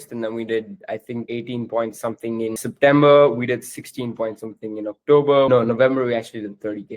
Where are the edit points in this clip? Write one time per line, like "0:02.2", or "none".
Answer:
0:01.3
0:02.6
0:05.5